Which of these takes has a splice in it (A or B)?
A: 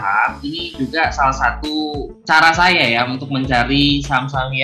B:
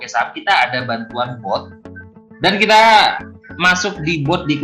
A